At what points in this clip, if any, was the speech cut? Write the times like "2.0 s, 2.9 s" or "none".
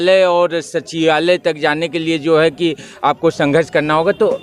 none